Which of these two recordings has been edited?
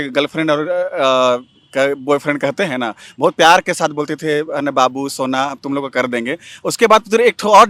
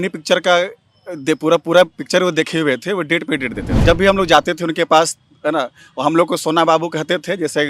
second; 1 cut; at 3.6 s

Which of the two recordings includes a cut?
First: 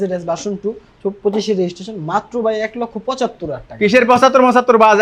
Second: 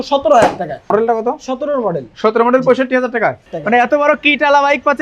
second; 2 cuts; at 0.9 s, 3.5 s

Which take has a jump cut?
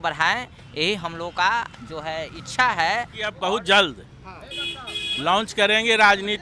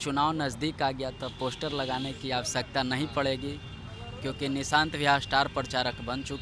first; 1 cut; at 3.4 s

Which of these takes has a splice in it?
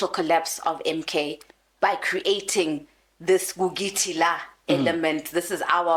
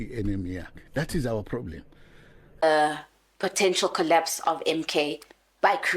second; 1 cut; at 2.4 s

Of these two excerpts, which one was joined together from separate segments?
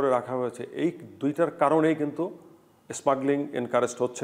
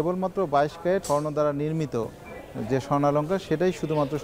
second; 1 cut; at 1.0 s

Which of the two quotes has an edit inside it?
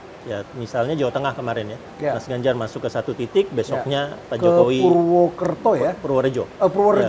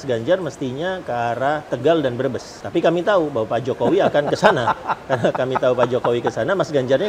second; 2 cuts; at 1.7 s, 2.6 s

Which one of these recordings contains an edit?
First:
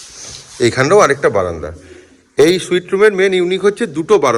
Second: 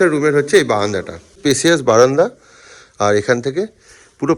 second; 1 cut; at 1.4 s

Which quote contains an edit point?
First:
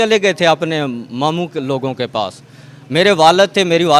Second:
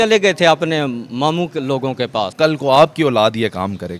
second; 1 cut; at 2.3 s

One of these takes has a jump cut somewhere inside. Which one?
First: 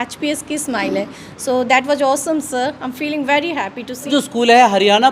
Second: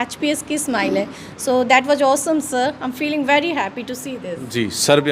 first; 1 cut; at 4.1 s

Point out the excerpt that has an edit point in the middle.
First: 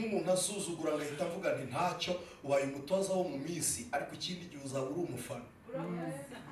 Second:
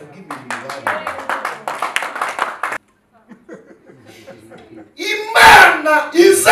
second; 1 cut; at 2.8 s

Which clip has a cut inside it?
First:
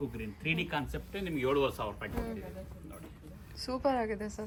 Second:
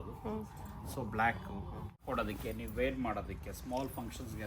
second; 1 cut; at 2.0 s

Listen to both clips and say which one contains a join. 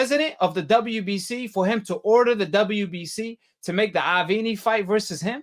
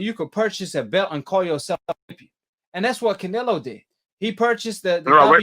second; 1 cut; at 4.1 s

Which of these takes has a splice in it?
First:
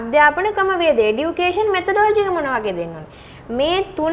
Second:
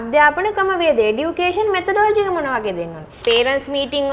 second; 1 cut; at 3.1 s

